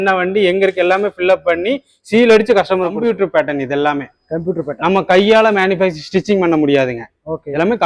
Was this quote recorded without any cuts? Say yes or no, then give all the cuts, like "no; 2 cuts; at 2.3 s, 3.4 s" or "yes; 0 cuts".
no; 1 cut; at 3.0 s